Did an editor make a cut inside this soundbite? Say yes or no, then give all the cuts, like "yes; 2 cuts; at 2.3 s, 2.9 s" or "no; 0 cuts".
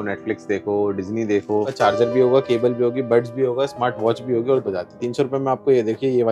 yes; 2 cuts; at 1.7 s, 4.6 s